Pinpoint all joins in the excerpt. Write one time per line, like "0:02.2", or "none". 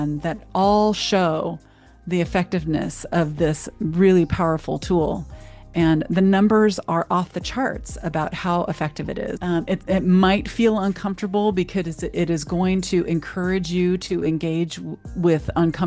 0:09.4